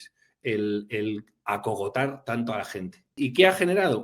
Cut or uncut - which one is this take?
cut